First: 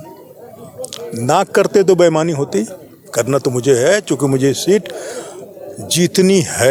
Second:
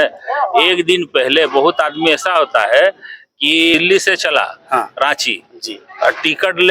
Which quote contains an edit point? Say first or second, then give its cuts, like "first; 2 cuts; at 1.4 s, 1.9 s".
second; 1 cut; at 3.7 s